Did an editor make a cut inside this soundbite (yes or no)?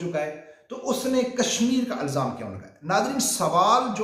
no